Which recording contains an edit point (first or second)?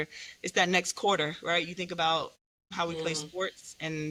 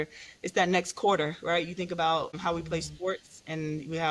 second